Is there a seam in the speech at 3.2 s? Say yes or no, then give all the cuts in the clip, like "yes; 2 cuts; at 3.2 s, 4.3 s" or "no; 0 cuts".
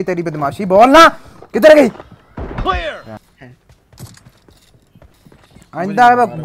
yes; 1 cut; at 3.2 s